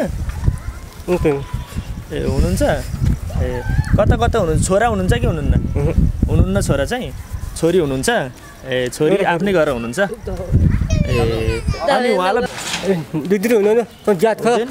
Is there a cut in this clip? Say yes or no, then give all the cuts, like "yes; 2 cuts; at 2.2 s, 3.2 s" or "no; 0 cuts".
yes; 1 cut; at 12.4 s